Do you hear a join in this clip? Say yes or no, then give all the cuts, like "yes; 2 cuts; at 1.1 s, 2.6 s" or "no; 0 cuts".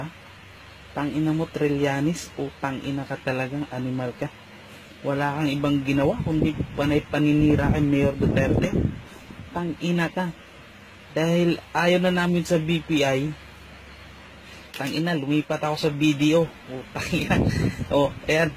yes; 1 cut; at 14.6 s